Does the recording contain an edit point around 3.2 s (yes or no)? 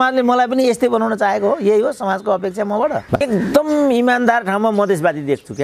yes